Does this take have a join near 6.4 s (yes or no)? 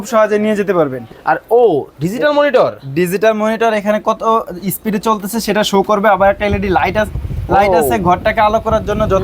no